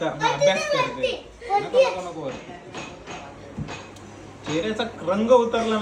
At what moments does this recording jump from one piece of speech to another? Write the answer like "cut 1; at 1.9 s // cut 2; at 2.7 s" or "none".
none

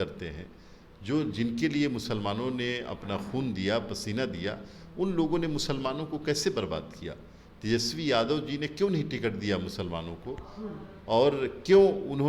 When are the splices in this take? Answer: none

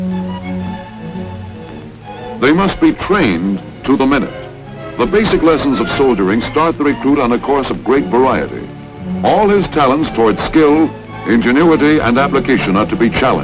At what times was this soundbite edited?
cut 1; at 1.3 s

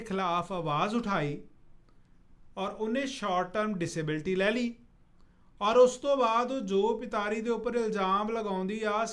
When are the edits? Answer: none

